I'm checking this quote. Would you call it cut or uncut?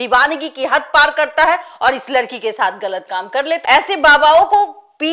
cut